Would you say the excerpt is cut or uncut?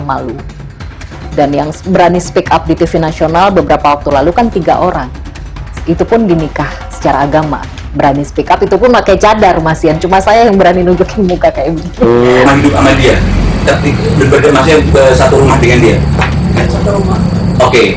cut